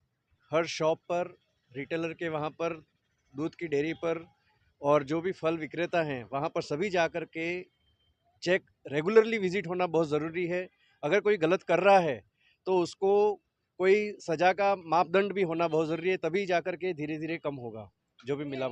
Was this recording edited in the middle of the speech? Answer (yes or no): no